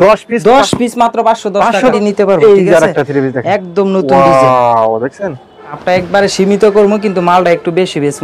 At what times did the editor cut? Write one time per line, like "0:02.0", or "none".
0:01.9
0:05.8